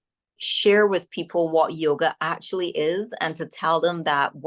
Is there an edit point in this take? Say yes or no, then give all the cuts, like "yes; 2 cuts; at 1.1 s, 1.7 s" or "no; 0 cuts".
no; 0 cuts